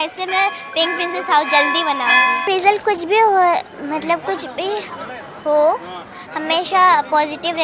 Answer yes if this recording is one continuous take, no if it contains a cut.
no